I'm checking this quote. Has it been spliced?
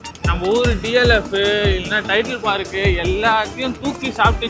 no; 0 cuts

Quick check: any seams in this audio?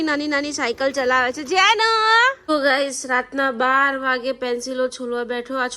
yes; 1 cut; at 2.4 s

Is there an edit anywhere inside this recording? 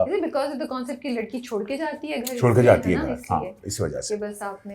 no; 0 cuts

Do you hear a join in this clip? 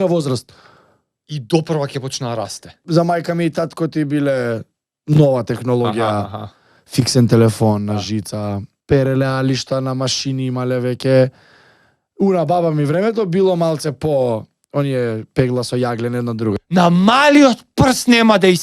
yes; 3 cuts; at 2.8 s, 8.7 s, 16.5 s

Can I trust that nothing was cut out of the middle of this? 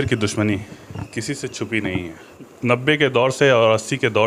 no; 1 cut; at 2.4 s

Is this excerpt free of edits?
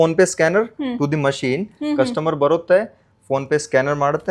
yes; 0 cuts

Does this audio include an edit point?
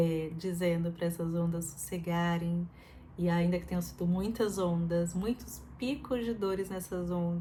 no; 0 cuts

